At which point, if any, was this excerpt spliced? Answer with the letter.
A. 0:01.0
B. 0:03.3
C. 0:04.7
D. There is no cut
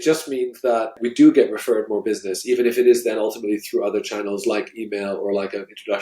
A